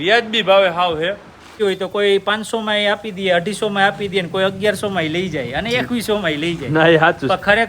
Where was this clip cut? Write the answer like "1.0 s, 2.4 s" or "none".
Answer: 1.5 s